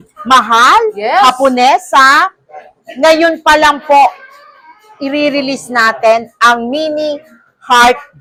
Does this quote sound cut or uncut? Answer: uncut